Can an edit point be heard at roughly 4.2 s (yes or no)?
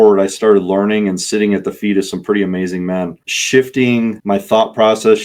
yes